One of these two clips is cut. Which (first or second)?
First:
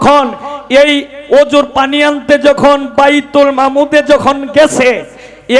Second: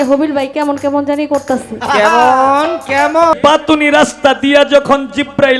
second